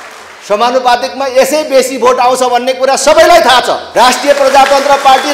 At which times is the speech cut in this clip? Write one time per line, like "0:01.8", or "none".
0:03.8